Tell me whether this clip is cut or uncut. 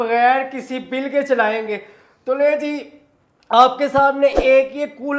uncut